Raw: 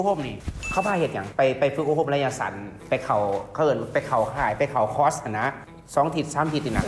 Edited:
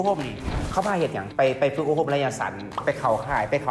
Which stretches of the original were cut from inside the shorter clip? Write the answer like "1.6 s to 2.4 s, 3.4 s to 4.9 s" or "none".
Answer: 2.8 s to 3.8 s